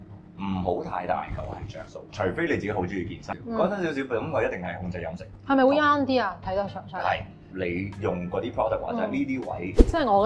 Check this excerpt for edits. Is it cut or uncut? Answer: cut